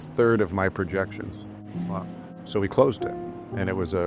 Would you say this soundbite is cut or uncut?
uncut